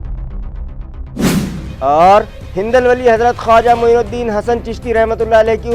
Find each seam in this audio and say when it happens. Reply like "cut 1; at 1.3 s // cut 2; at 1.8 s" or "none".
none